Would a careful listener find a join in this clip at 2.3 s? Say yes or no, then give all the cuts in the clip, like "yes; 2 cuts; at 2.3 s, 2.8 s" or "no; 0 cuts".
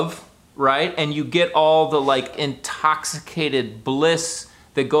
yes; 1 cut; at 2.3 s